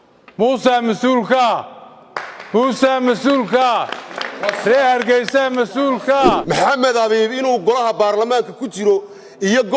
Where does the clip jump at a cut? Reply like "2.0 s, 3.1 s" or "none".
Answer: 6.4 s

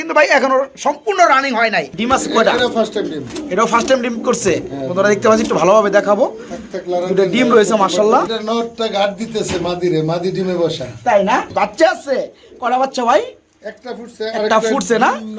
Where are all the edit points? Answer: 1.9 s, 8.3 s, 11.5 s

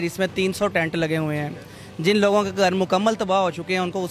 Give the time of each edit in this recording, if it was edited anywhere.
none

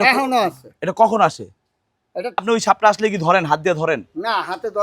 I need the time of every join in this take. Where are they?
2.4 s

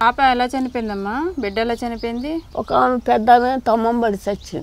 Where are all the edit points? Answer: 2.5 s

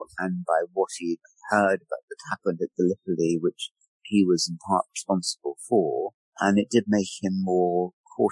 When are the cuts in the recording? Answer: 1.3 s

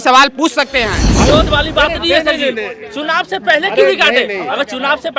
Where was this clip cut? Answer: 1.2 s

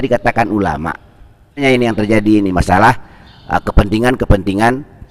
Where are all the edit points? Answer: 1.6 s

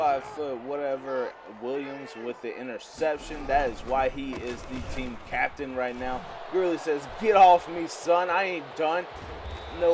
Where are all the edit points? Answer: none

